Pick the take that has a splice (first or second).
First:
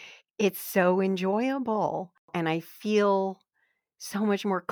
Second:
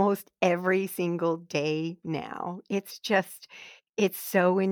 first